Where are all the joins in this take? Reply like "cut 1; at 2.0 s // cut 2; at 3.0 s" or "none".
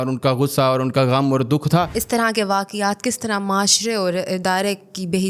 cut 1; at 2.0 s